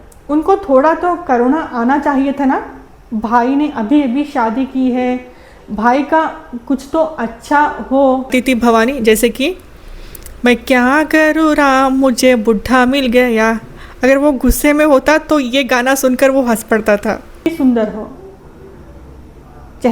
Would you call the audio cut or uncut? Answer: cut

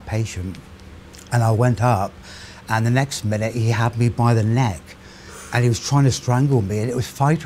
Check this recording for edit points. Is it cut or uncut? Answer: cut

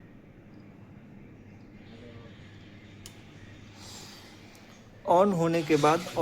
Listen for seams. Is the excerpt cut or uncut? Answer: uncut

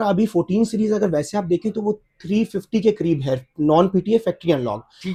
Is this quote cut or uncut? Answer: uncut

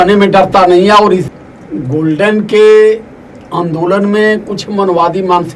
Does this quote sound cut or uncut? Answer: cut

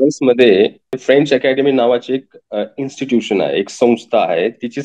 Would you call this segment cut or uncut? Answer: cut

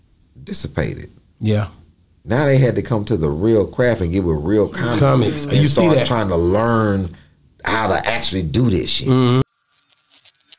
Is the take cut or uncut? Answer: cut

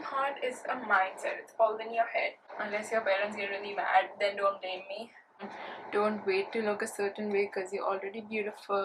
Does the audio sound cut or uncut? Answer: cut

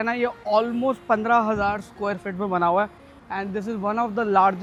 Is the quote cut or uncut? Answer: uncut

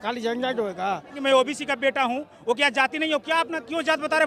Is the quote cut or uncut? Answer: cut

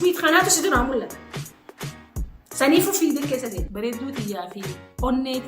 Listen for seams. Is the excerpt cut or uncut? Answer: cut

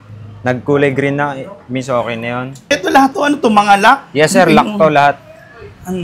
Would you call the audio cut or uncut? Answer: cut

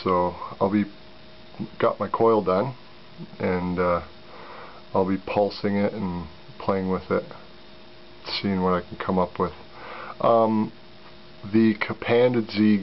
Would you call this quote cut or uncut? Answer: uncut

